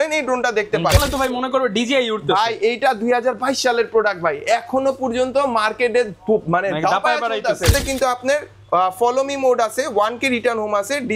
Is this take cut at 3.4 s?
no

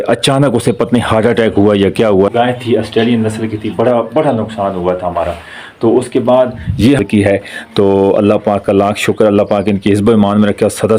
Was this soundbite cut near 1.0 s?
no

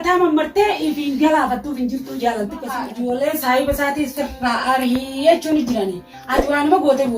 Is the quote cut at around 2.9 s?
yes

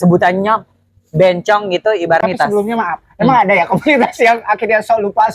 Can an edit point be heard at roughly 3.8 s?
no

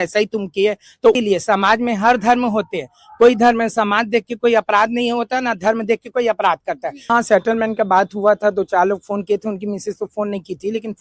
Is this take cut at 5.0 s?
no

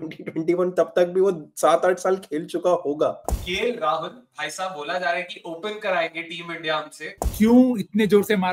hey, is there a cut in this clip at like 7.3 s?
yes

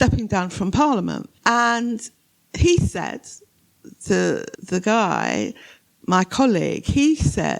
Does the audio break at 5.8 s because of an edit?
no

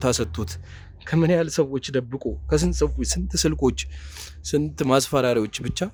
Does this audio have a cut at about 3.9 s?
no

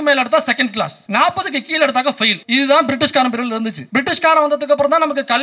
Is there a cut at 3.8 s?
yes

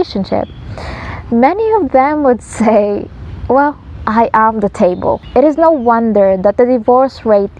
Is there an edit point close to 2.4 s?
no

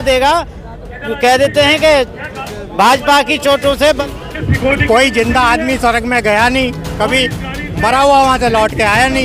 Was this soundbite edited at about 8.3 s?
no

